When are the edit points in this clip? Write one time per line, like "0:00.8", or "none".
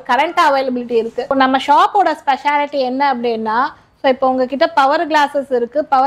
0:01.2